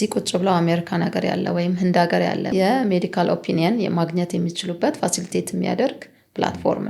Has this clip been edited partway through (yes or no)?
yes